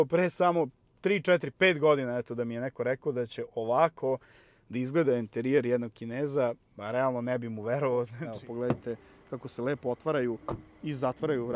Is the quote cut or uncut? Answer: cut